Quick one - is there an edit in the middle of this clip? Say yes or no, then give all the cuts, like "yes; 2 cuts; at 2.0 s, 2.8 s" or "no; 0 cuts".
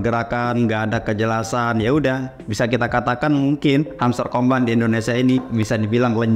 no; 0 cuts